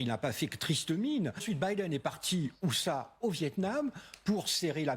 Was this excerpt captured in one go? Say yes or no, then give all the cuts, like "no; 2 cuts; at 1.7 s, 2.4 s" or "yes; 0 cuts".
no; 1 cut; at 1.4 s